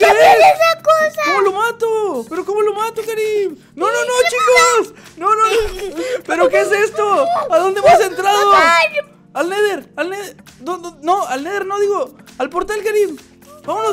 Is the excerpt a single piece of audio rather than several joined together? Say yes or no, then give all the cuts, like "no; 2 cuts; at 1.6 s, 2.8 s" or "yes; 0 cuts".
yes; 0 cuts